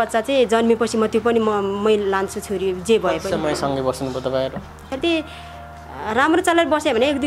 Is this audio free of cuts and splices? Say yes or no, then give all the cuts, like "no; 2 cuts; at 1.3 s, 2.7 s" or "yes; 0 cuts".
no; 1 cut; at 4.7 s